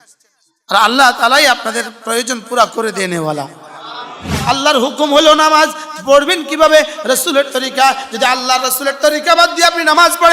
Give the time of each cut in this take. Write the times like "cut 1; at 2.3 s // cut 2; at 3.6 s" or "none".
cut 1; at 4.4 s